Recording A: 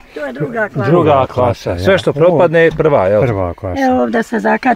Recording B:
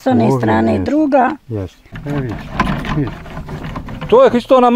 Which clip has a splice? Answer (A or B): B